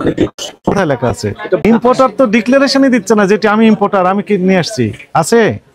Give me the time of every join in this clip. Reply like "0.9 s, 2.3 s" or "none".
1.6 s